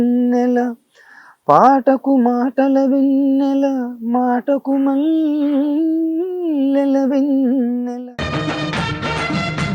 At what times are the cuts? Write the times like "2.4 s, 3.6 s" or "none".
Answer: 8.0 s